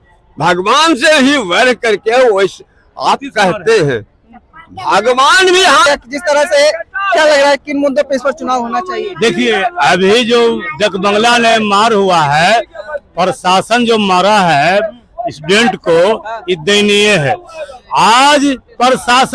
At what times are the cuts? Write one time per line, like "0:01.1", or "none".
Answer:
none